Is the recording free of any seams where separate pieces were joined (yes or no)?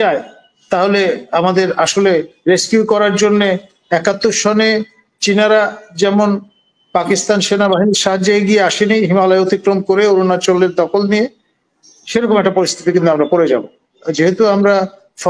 no